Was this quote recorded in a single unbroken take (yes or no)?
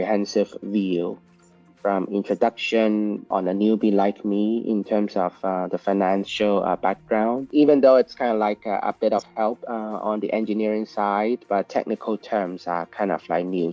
no